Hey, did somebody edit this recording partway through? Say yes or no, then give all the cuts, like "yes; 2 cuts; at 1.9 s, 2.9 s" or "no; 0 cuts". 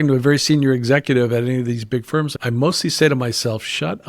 yes; 1 cut; at 2.3 s